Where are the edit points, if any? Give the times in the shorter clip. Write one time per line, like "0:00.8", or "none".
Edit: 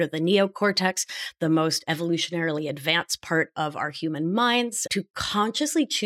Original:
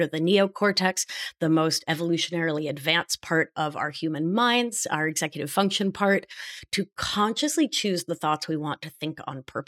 0:04.8